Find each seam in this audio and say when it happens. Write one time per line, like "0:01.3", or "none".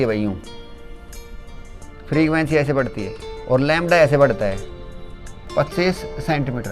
0:05.4